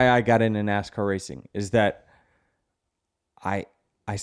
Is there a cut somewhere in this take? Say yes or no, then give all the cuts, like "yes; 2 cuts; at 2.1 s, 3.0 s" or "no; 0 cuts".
no; 0 cuts